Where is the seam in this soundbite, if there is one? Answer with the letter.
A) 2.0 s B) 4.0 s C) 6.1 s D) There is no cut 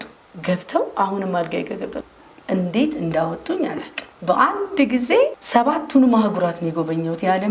A